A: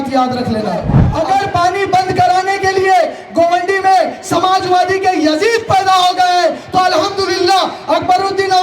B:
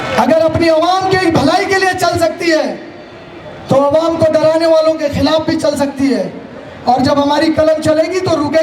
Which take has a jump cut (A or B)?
A